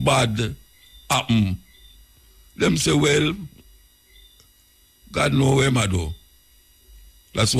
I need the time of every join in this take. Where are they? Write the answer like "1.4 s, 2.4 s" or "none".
none